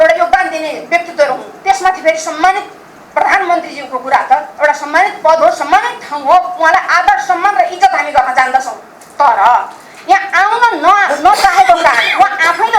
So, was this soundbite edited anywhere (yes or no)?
no